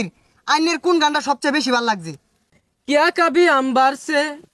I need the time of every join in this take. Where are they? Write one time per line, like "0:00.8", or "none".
0:02.4